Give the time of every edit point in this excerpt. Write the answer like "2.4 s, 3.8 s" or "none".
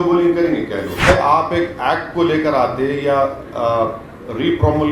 1.1 s